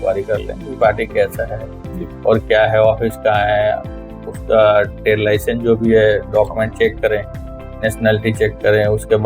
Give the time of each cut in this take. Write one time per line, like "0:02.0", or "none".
none

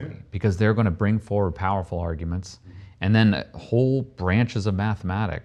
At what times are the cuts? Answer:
none

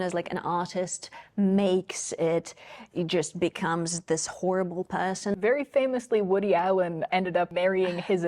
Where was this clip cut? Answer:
0:05.4
0:07.2

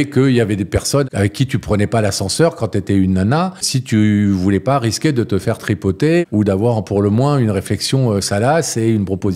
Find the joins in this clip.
0:01.1
0:03.7
0:06.2

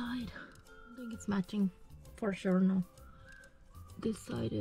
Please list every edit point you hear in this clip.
0:01.2

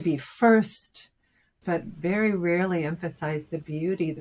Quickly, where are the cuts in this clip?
0:01.5

